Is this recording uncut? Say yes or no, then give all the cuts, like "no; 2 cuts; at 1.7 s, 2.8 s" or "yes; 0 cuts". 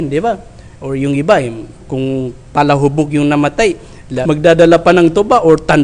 no; 1 cut; at 4.1 s